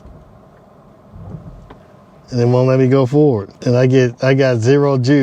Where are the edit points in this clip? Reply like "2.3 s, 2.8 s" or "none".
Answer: 3.5 s